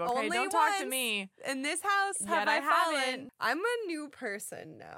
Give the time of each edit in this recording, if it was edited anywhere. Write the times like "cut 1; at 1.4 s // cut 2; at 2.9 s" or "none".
cut 1; at 3.3 s